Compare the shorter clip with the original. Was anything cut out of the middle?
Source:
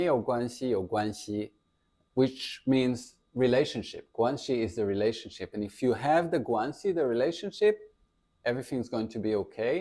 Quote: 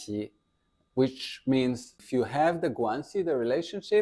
yes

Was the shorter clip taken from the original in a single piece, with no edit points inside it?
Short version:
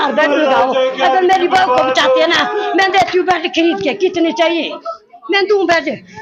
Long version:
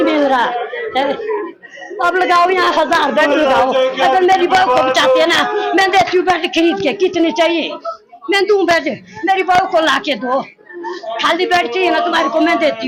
yes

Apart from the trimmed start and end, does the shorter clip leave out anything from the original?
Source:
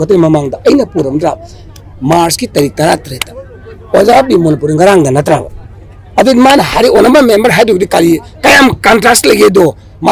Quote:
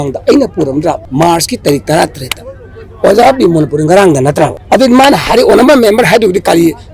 yes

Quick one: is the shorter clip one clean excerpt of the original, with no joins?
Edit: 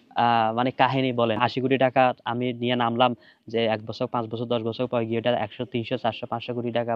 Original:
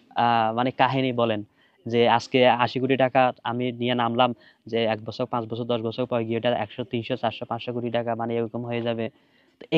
no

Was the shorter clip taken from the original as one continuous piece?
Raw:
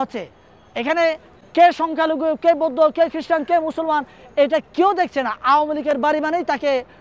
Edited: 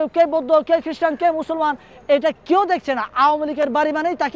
yes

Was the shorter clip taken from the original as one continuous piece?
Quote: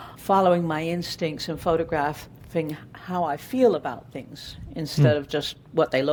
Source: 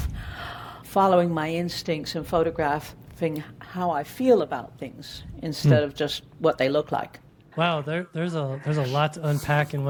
yes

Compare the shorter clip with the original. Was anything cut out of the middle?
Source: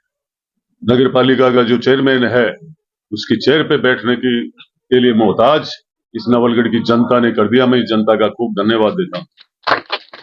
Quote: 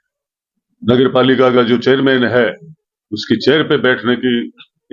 no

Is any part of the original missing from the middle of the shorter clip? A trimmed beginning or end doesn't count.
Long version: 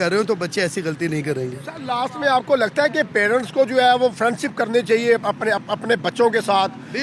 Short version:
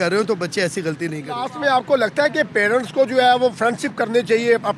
yes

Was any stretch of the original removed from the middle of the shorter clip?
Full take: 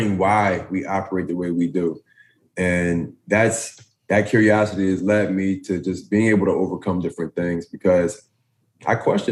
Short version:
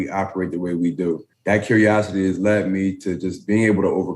yes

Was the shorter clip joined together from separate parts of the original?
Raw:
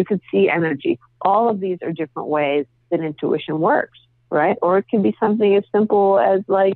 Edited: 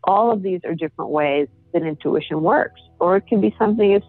yes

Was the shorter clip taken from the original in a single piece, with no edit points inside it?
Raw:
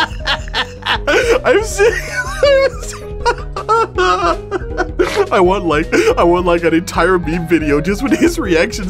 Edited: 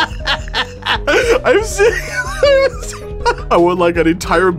no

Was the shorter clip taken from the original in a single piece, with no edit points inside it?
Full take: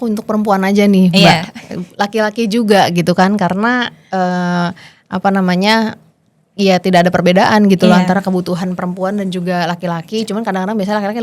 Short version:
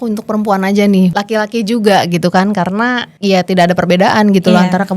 no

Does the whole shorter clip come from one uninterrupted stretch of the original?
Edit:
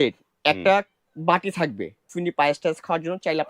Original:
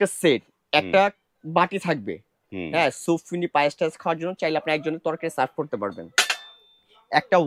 no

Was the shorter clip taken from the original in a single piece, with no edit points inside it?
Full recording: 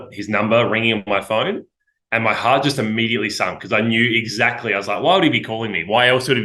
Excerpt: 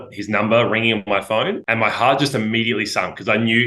no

